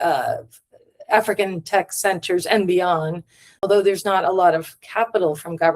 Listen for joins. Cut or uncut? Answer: cut